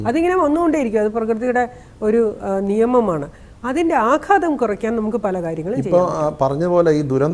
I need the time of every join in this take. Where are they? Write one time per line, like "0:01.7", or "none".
none